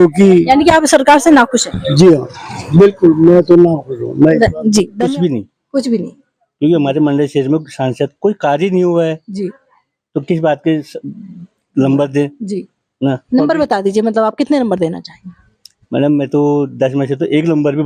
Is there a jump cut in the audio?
yes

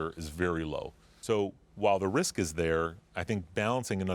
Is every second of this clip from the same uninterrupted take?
no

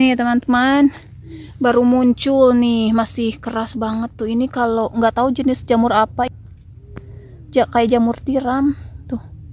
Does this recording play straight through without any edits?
no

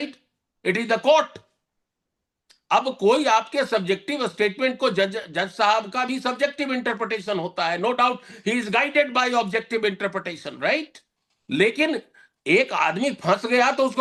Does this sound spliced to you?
no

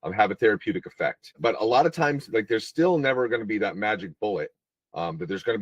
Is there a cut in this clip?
yes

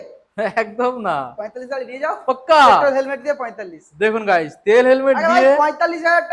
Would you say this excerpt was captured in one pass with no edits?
yes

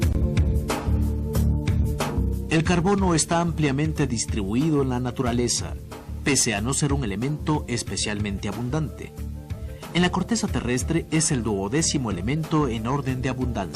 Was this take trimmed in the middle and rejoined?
yes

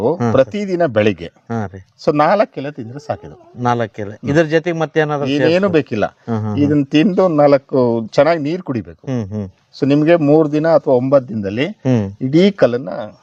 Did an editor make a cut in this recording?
no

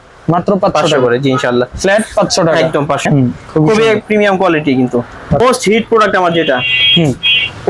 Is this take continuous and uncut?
no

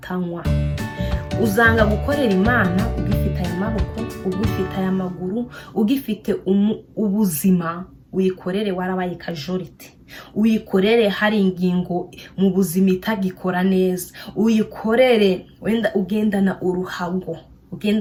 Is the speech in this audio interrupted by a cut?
no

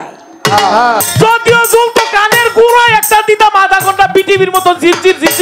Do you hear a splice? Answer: yes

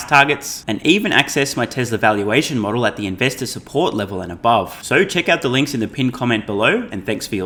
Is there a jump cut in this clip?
no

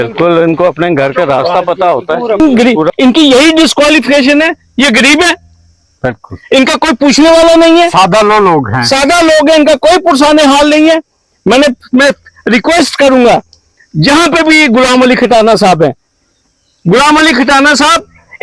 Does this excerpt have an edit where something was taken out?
yes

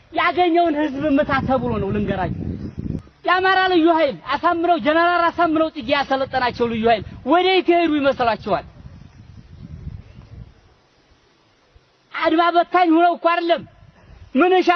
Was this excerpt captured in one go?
no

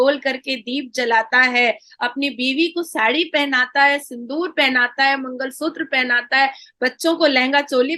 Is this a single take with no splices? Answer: yes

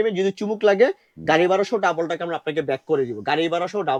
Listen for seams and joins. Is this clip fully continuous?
yes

